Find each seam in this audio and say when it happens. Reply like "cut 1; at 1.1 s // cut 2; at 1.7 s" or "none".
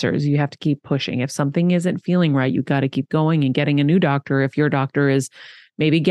none